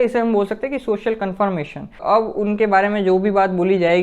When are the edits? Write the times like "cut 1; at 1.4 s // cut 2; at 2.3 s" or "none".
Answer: cut 1; at 2.0 s